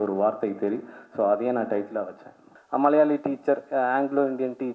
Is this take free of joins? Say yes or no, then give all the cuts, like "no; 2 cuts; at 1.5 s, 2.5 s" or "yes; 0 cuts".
no; 1 cut; at 2.5 s